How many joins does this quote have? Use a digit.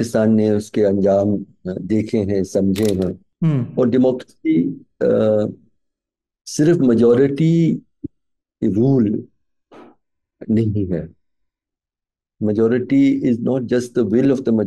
1